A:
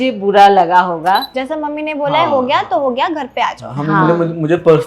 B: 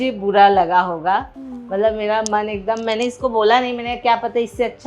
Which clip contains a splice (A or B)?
A